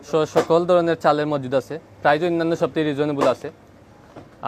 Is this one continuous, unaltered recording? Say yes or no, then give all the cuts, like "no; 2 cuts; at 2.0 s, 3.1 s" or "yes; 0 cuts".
yes; 0 cuts